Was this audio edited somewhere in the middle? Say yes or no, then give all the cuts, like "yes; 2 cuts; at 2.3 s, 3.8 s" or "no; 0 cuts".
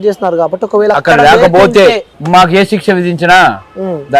yes; 1 cut; at 2.1 s